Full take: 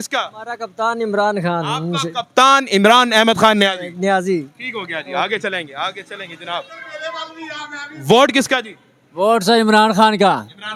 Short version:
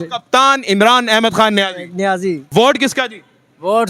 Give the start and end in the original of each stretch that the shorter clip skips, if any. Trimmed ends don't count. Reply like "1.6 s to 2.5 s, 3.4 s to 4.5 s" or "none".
4.5 s to 8.0 s